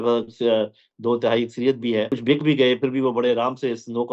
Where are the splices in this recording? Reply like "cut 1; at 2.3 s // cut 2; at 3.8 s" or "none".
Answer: cut 1; at 2.1 s